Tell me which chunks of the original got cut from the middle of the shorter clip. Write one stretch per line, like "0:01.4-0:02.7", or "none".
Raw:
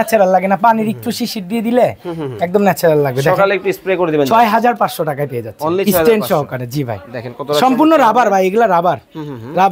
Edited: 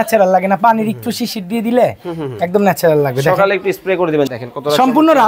0:04.3-0:07.1